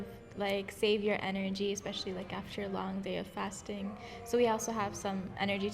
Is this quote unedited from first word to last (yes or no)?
yes